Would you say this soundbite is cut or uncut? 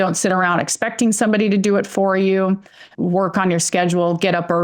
cut